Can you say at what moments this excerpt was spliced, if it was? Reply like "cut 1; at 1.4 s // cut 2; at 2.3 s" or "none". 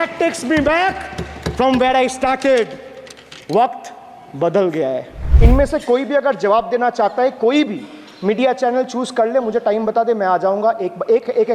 cut 1; at 5.2 s

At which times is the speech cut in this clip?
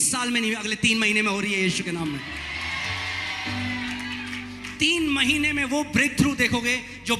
none

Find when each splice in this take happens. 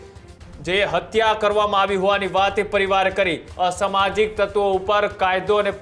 cut 1; at 3.4 s

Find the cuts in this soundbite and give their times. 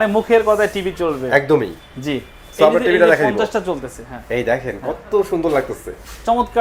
none

